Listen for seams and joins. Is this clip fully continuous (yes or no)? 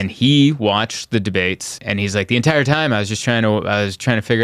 no